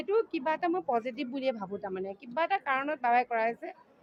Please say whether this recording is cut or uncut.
uncut